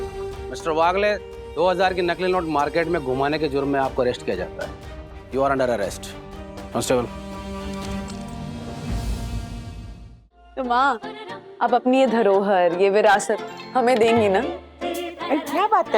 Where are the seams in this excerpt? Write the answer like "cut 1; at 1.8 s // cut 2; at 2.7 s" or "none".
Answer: cut 1; at 10.3 s